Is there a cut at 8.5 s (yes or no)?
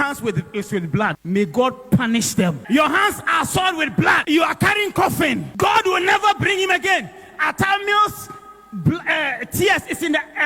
no